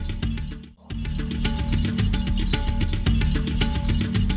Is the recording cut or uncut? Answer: cut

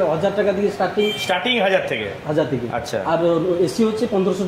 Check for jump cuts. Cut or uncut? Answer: uncut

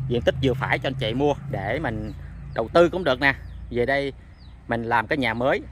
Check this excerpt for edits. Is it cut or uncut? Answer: uncut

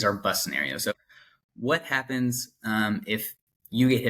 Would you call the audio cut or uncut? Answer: cut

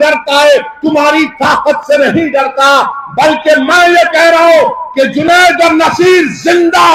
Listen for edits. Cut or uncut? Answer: uncut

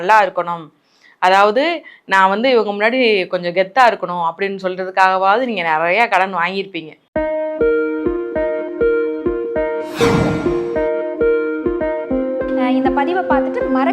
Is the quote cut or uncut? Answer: cut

